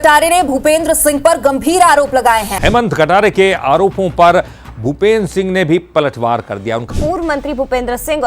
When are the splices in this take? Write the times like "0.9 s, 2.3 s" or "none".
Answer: 6.9 s